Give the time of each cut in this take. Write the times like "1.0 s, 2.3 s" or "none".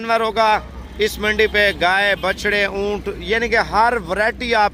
none

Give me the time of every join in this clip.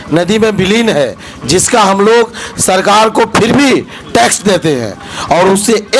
none

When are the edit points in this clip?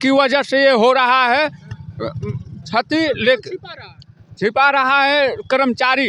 none

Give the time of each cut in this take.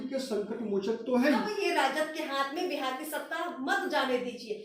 1.5 s

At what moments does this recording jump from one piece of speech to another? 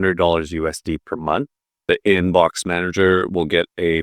1.8 s

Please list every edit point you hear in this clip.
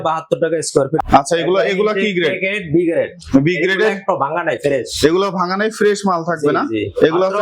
1.0 s

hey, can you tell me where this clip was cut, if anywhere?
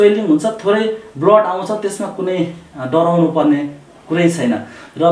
none

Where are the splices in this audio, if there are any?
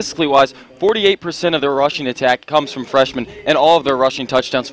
none

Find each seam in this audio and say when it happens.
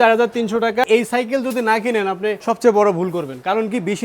0.8 s, 2.4 s

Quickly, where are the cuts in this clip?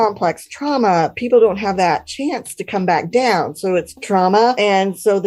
4.2 s

